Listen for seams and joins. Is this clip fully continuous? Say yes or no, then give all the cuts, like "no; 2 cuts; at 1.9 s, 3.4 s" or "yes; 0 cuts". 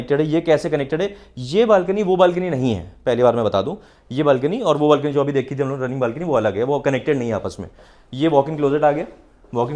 yes; 0 cuts